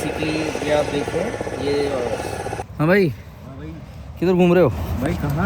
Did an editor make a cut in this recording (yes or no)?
yes